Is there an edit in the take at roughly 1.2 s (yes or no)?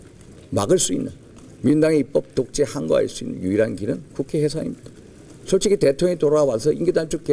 no